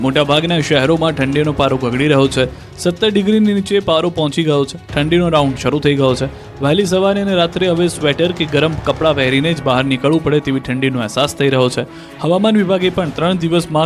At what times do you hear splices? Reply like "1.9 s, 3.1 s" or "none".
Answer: 10.4 s